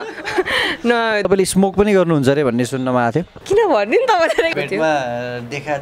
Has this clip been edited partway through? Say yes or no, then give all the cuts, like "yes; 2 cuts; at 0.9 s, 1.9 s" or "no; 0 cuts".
yes; 3 cuts; at 1.2 s, 3.3 s, 4.5 s